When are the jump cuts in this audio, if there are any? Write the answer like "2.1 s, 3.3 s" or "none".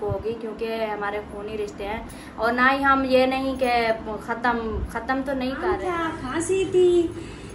5.7 s

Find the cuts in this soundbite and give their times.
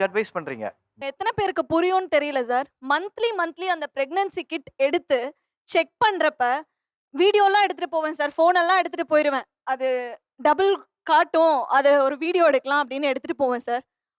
1.0 s

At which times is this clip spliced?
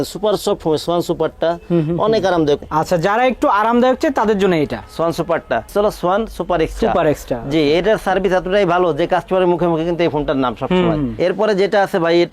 2.6 s, 5.7 s, 11.1 s

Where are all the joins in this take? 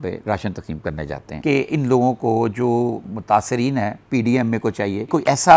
1.4 s

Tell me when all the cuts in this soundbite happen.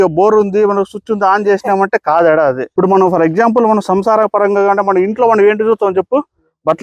2.7 s

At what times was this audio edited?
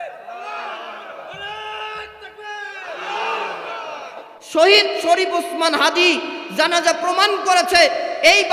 4.4 s

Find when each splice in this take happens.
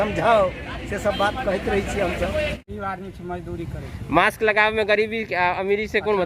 2.7 s

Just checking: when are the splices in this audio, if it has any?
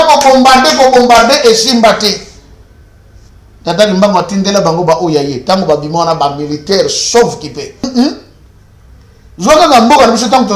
7.9 s

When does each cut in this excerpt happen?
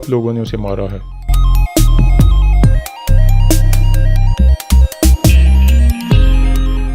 2.8 s

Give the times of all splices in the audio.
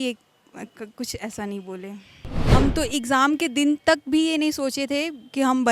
2.5 s

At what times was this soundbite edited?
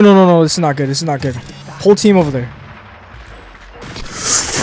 3.1 s

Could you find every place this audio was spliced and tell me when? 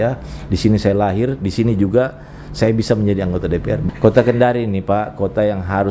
3.8 s

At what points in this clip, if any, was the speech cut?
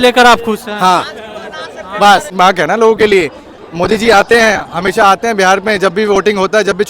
2.3 s

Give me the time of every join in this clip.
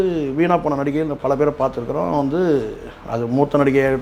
none

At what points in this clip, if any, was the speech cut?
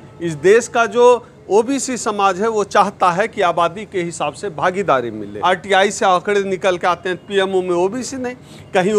5.3 s

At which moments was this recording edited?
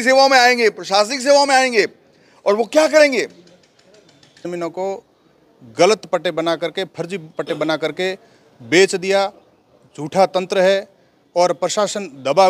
4.5 s

